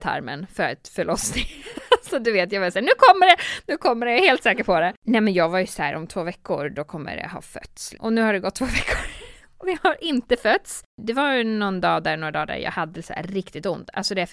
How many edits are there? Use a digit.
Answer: 3